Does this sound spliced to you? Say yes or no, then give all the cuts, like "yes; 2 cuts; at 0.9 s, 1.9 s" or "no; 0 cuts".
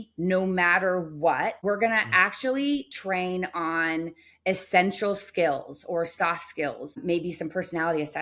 yes; 2 cuts; at 1.6 s, 7.0 s